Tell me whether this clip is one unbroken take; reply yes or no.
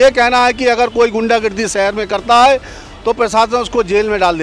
yes